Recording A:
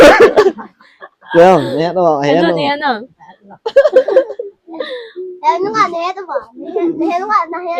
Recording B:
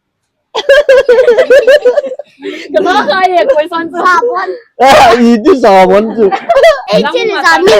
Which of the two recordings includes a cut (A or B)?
B